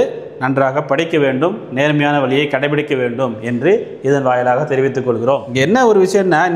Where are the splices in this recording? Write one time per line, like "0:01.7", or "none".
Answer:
0:05.5

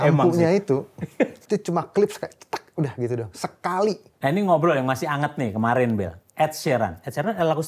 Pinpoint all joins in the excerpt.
0:01.4
0:04.1

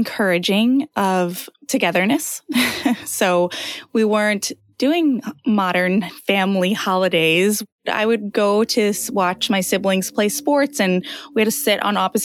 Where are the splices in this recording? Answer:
none

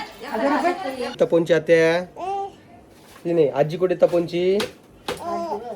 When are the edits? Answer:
0:01.1

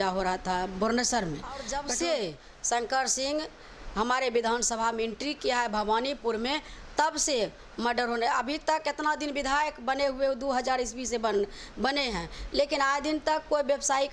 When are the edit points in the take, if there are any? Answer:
0:01.7

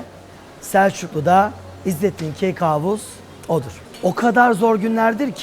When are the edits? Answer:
0:03.8

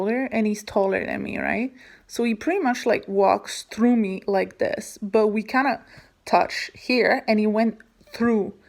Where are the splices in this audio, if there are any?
none

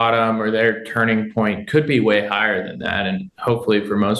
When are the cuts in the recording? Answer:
none

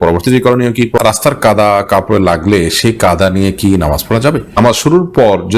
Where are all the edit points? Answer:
0:01.0
0:04.9

